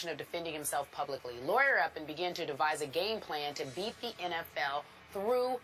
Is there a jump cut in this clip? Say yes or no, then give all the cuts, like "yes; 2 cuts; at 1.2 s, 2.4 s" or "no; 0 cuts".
yes; 1 cut; at 4.2 s